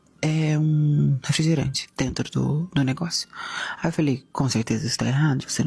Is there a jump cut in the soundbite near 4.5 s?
no; 0 cuts

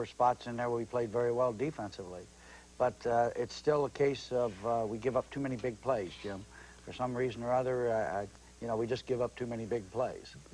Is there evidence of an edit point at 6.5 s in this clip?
no; 0 cuts

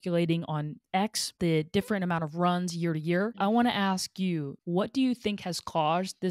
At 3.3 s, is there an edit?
yes; 2 cuts; at 1.3 s, 3.3 s

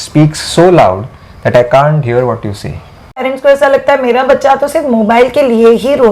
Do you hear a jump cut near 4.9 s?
no; 1 cut; at 3.2 s

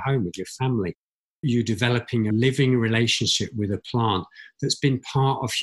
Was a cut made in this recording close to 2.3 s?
yes; 2 cuts; at 1.4 s, 2.3 s

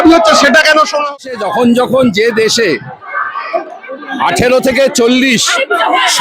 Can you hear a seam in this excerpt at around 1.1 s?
yes; 1 cut; at 1.1 s

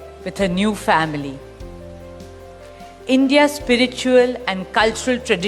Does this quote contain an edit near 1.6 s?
yes; 2 cuts; at 1.6 s, 3.1 s

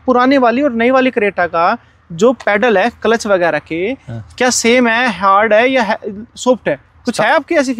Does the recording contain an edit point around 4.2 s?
no; 0 cuts

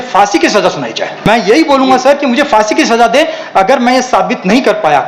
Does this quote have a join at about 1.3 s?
yes; 1 cut; at 1.3 s

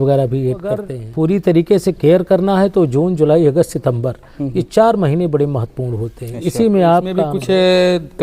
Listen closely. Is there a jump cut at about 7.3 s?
yes; 2 cuts; at 1.0 s, 7.3 s

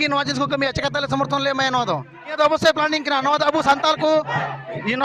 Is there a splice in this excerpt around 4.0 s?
no; 1 cut; at 2.3 s

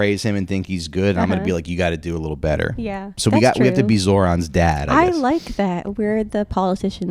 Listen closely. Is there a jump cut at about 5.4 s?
no; 1 cut; at 3.1 s

